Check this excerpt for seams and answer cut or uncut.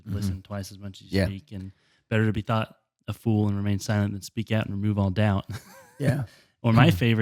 uncut